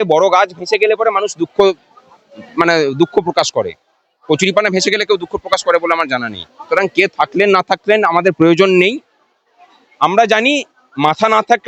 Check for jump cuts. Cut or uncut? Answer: uncut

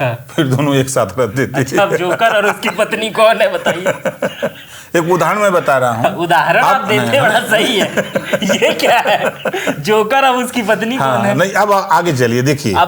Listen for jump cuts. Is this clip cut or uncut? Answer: uncut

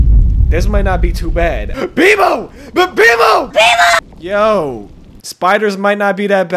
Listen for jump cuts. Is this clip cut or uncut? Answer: cut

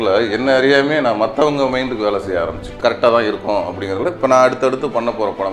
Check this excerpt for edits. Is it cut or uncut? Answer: cut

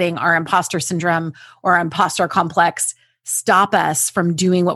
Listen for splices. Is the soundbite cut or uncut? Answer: uncut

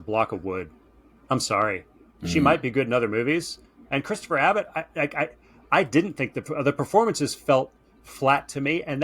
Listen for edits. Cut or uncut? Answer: uncut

